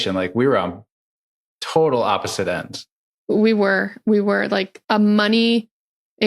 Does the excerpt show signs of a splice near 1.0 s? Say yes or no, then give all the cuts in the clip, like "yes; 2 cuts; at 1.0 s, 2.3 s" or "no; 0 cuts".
no; 1 cut; at 4.7 s